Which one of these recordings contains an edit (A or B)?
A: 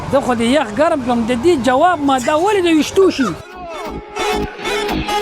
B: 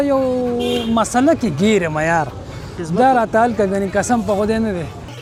A